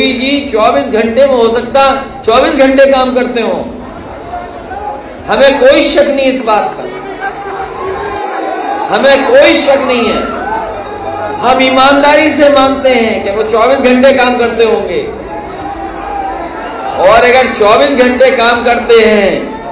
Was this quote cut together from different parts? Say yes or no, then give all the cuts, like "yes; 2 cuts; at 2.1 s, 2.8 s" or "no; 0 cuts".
no; 0 cuts